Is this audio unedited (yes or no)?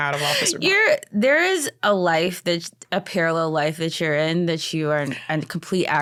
yes